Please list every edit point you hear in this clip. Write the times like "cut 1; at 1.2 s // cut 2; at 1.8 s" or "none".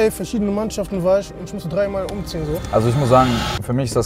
cut 1; at 2.6 s